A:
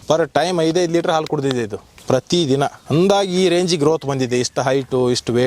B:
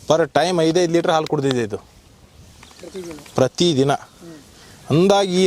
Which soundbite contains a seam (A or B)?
A